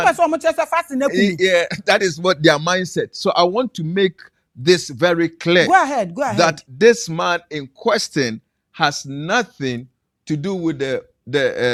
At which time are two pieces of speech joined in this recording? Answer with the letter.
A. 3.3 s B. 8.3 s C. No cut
C